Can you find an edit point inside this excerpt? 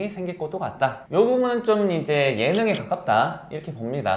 yes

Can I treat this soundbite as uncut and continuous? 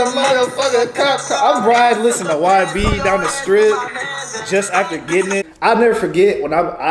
no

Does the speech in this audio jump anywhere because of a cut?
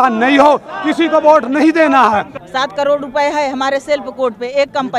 yes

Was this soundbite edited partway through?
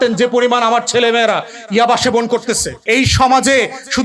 yes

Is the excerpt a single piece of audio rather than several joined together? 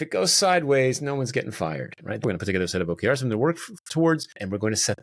yes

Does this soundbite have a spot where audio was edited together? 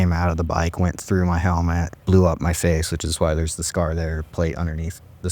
yes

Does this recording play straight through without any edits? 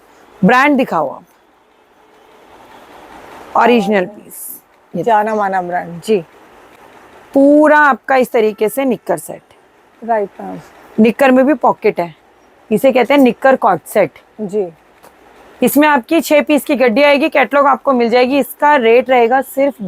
yes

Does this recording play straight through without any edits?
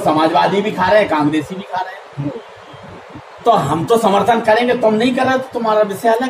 yes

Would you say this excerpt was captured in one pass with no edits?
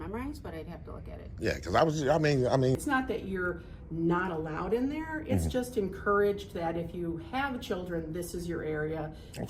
no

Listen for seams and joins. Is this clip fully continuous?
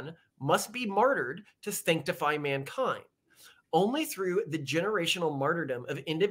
yes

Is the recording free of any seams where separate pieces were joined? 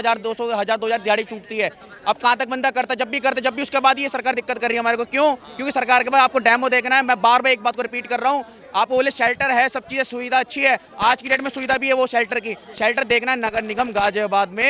yes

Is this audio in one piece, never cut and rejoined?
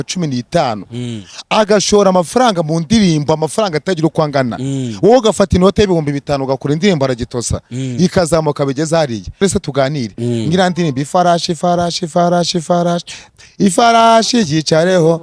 no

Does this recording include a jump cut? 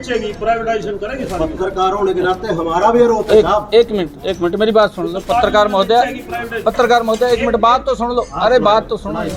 no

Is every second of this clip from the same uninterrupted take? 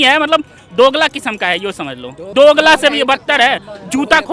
no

